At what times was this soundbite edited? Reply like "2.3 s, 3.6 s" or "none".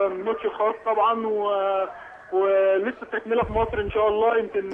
2.7 s